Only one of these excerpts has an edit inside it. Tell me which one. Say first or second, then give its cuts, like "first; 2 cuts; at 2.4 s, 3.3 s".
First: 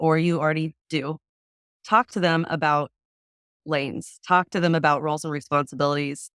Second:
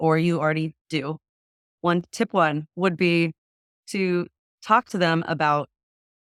first; 1 cut; at 1.6 s